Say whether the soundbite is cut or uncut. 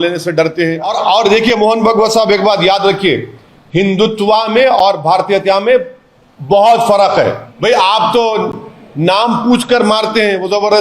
cut